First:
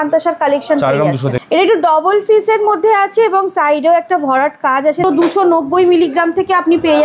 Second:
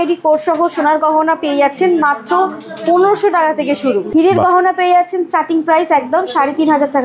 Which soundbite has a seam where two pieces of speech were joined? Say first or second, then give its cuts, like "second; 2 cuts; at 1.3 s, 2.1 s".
first; 2 cuts; at 1.3 s, 5.0 s